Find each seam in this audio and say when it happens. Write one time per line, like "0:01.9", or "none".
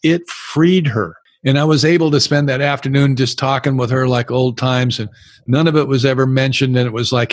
0:01.2

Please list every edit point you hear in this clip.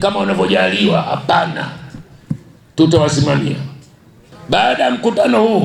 0:04.2

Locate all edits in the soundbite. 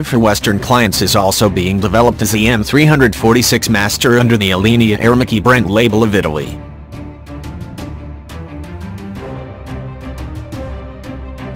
none

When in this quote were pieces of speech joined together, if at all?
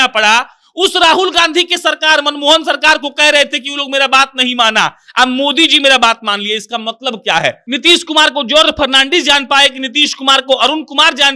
0:07.7

